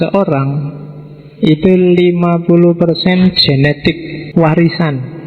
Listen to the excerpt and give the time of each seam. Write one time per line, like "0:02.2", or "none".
0:04.1